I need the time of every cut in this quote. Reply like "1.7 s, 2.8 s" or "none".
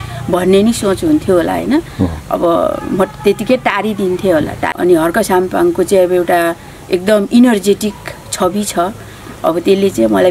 4.7 s

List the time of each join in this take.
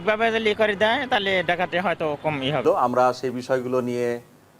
2.6 s

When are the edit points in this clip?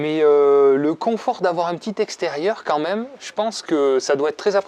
none

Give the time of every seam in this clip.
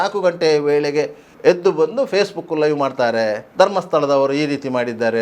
1.2 s, 3.4 s

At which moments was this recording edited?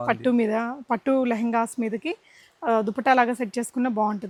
none

